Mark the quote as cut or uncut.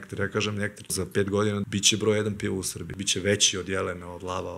cut